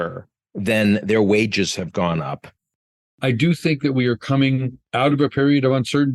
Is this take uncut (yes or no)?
no